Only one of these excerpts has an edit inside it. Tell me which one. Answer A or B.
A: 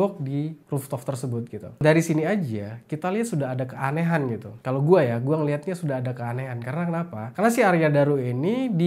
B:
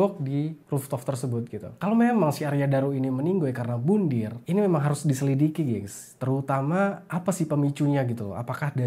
B